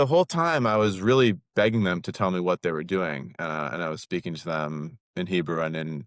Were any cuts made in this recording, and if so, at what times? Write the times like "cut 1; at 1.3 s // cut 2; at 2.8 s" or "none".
none